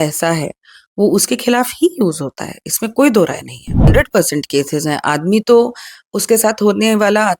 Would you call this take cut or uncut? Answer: cut